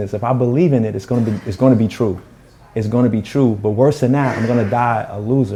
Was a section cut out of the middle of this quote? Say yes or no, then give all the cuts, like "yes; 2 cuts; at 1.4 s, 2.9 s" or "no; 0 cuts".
no; 0 cuts